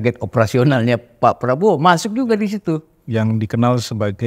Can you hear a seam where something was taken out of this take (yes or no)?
no